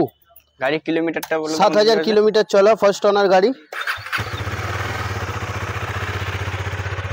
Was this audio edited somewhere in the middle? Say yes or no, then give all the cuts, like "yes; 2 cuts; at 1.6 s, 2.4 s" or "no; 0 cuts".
no; 0 cuts